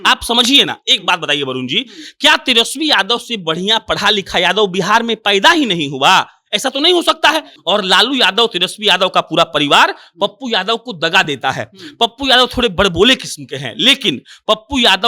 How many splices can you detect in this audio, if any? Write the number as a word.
one